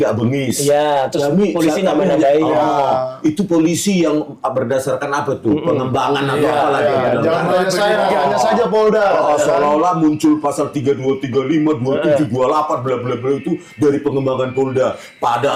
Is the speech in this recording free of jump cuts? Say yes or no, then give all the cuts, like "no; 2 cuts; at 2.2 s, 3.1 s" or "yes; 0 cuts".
yes; 0 cuts